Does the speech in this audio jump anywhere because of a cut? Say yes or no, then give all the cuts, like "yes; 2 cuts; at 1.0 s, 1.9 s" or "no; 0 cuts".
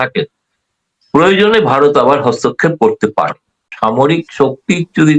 yes; 1 cut; at 3.6 s